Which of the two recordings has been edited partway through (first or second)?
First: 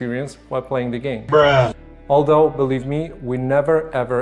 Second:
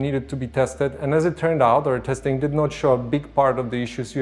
first